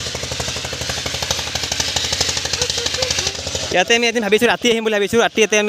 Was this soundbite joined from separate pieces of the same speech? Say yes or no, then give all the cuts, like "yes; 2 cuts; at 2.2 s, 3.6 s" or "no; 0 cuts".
yes; 1 cut; at 3.3 s